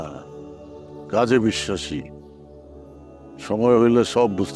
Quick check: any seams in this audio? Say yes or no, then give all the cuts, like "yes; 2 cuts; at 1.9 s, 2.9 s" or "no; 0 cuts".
no; 0 cuts